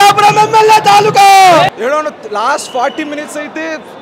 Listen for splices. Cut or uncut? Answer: cut